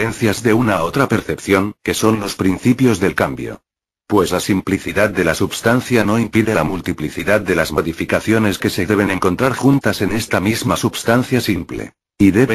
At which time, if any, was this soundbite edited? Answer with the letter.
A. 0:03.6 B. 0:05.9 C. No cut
B